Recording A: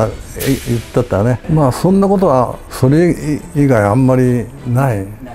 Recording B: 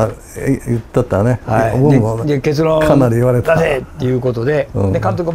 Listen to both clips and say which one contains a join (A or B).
A